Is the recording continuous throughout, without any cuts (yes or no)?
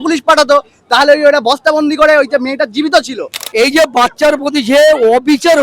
no